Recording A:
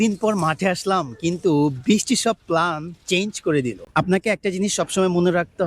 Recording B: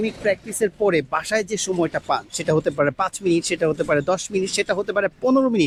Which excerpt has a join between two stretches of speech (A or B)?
A